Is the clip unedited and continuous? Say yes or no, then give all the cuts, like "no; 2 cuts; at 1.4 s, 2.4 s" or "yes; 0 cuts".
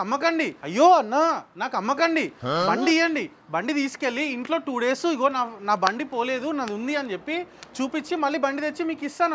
yes; 0 cuts